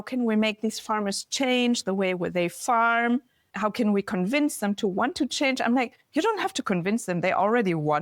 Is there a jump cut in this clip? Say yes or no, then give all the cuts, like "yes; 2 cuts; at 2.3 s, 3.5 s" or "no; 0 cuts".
yes; 1 cut; at 3.5 s